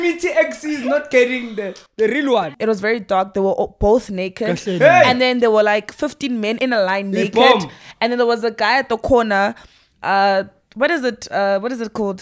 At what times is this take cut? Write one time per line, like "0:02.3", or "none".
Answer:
0:02.5
0:06.6

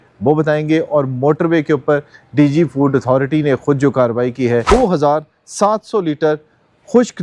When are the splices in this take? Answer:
0:04.6

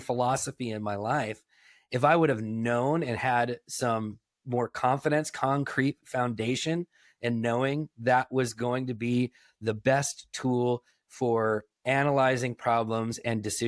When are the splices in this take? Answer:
none

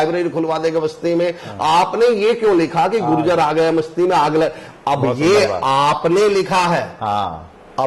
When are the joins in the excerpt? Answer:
none

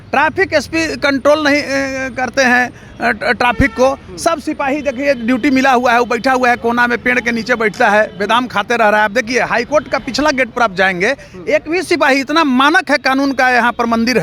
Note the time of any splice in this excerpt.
none

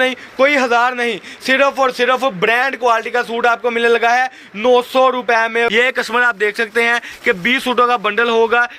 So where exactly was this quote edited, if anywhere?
0:05.7

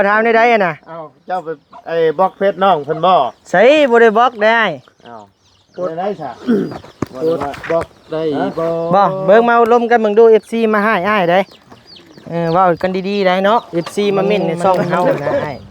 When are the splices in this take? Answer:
0:13.7

